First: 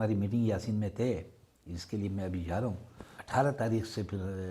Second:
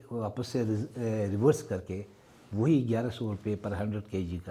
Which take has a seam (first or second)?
first